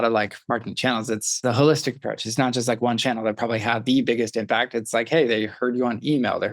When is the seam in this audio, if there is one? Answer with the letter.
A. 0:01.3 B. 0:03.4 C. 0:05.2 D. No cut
A